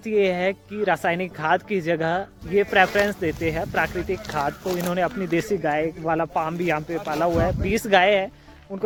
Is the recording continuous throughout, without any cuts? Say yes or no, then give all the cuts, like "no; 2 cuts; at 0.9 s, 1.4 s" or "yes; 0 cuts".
yes; 0 cuts